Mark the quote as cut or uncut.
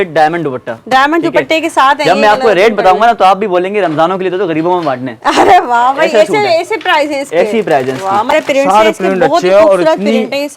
cut